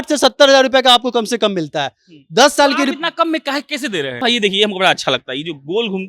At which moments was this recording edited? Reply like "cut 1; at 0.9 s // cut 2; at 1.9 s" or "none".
cut 1; at 4.2 s